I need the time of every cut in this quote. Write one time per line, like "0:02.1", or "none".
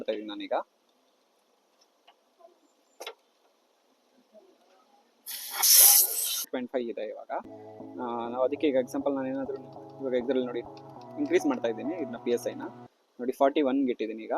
0:06.5